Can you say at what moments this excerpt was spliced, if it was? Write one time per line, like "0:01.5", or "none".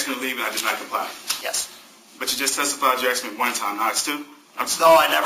0:01.3